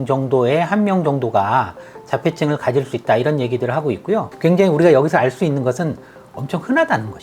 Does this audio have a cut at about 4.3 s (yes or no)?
yes